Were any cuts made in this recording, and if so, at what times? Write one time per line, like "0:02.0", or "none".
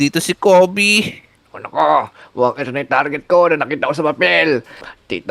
0:01.5